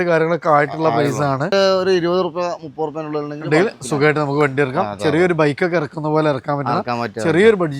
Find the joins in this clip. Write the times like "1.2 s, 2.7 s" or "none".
1.5 s